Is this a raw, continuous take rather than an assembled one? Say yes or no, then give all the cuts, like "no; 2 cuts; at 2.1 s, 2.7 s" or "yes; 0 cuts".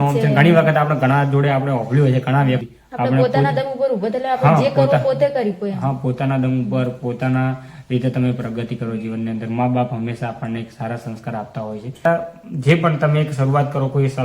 no; 2 cuts; at 2.6 s, 12.0 s